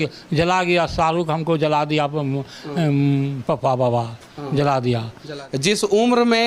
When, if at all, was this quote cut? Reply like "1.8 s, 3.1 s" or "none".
5.4 s